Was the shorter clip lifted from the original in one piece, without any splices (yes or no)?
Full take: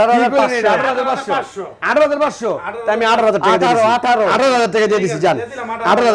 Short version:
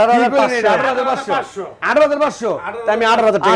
yes